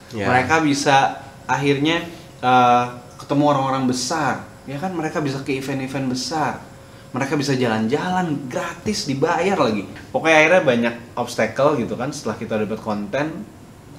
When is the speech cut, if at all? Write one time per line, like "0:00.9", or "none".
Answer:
0:10.0